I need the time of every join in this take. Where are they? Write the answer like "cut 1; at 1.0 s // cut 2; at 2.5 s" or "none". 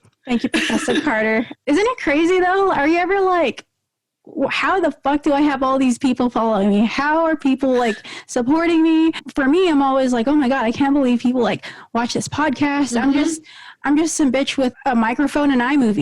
cut 1; at 1.5 s // cut 2; at 9.3 s // cut 3; at 14.7 s